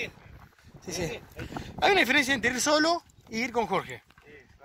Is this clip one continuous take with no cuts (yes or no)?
yes